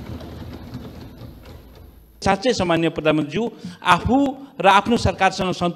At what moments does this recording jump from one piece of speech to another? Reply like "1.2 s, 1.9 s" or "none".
2.2 s